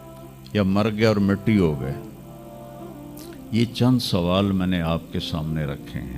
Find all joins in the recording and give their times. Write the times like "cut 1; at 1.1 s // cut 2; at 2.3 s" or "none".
none